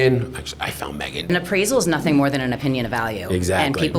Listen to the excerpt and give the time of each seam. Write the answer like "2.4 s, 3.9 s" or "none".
1.3 s

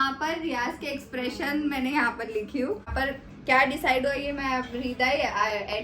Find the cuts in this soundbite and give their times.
2.9 s

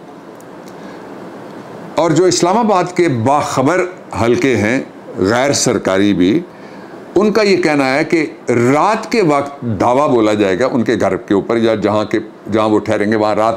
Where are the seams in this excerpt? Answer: none

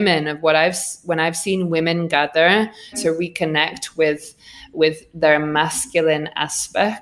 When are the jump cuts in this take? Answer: 3.0 s

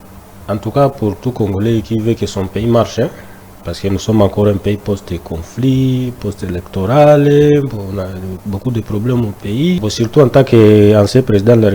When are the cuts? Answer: 9.8 s

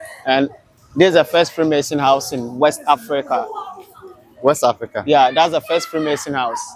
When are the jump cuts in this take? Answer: none

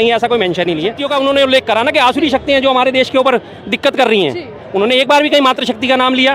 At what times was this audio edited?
1.0 s

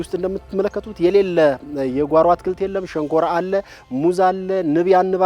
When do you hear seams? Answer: none

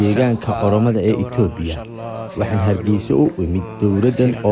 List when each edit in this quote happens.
none

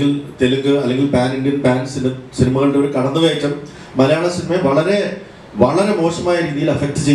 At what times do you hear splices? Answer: none

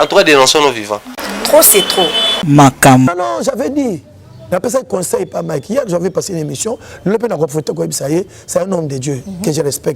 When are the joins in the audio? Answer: 3.1 s

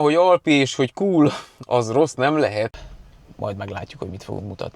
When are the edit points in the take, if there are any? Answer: 2.7 s

